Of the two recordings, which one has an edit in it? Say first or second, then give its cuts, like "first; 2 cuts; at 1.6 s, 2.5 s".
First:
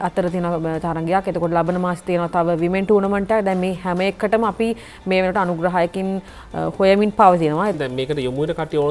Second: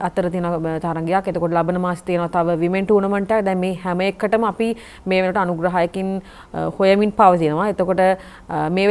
first; 1 cut; at 7.8 s